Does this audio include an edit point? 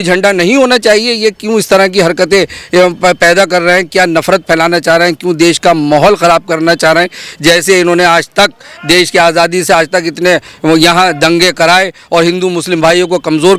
no; 0 cuts

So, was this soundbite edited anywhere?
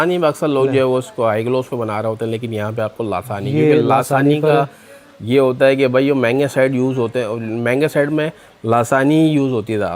no; 0 cuts

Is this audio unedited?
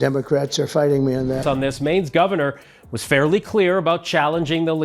no; 1 cut; at 1.4 s

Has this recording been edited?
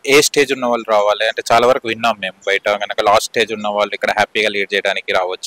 no; 0 cuts

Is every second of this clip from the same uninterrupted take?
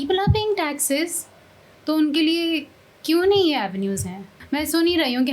no; 1 cut; at 4.3 s

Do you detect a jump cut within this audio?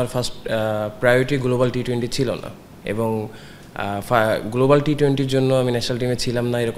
no; 0 cuts

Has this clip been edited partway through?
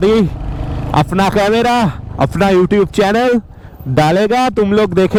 no; 0 cuts

